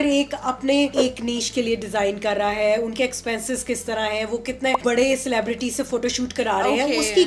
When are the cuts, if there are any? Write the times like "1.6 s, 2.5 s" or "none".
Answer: 0.9 s, 4.8 s